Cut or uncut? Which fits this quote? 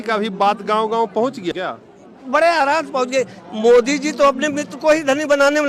cut